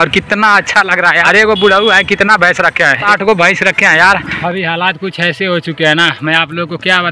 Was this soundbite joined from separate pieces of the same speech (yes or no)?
yes